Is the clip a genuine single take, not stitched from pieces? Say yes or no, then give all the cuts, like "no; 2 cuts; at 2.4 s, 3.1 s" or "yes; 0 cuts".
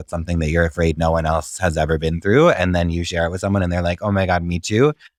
yes; 0 cuts